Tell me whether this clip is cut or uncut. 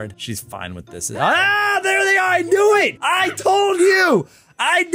cut